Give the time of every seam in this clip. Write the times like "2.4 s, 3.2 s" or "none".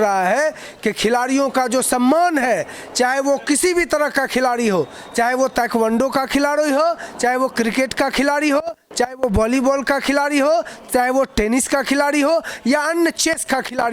none

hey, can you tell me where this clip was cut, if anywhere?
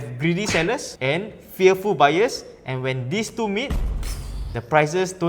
0.9 s

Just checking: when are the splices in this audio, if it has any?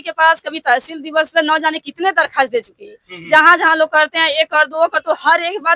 none

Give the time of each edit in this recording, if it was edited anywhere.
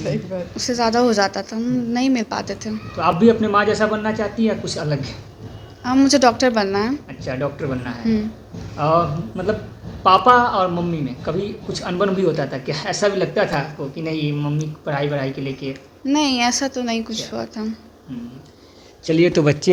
none

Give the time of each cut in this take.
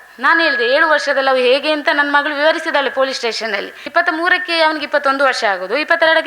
3.9 s

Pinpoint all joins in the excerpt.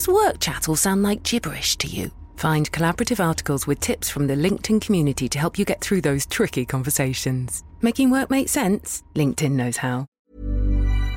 10.1 s

